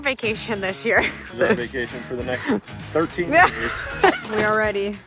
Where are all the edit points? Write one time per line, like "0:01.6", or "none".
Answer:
0:01.4
0:04.2